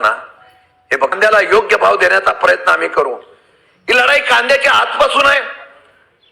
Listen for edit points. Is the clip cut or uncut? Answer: cut